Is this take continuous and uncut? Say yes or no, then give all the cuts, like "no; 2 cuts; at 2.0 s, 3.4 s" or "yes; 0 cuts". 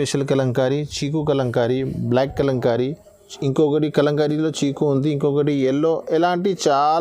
yes; 0 cuts